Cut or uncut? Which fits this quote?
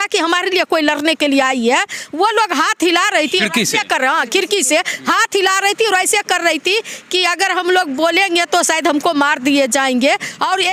uncut